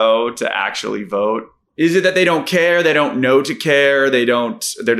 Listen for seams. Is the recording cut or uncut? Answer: cut